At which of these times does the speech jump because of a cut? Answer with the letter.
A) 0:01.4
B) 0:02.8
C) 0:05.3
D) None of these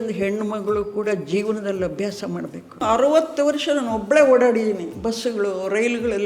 B